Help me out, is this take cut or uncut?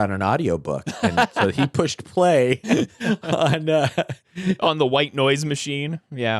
uncut